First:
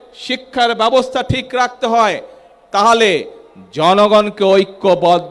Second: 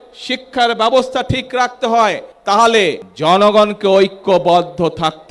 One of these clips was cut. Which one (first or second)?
second